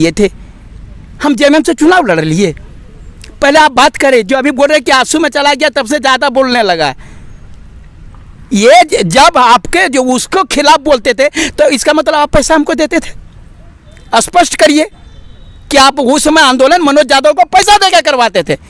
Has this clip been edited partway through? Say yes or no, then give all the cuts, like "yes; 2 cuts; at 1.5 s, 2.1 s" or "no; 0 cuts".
no; 0 cuts